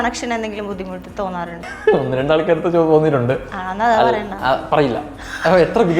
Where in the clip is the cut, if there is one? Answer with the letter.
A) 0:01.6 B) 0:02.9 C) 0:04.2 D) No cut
A